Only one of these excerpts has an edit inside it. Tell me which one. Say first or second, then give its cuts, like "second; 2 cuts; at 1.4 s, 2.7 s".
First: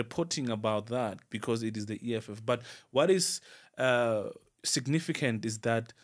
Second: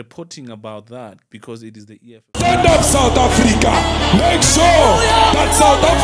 second; 1 cut; at 2.3 s